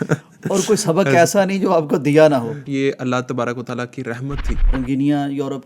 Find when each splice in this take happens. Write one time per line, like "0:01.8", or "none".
0:02.6
0:04.7